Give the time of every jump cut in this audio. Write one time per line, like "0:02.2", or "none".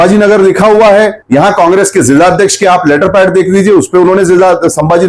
0:01.2